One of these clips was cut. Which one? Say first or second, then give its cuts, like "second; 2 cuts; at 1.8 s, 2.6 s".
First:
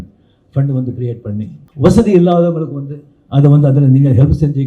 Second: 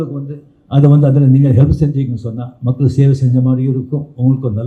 first; 1 cut; at 1.6 s